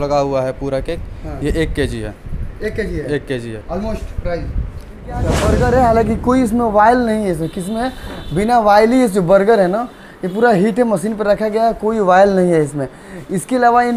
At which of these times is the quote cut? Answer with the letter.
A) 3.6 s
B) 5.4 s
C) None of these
B